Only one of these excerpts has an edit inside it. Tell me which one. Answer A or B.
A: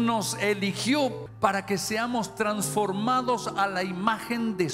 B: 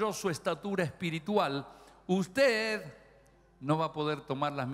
A